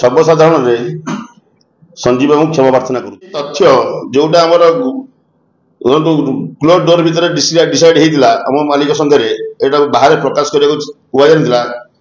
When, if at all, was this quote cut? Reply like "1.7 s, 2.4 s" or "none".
3.4 s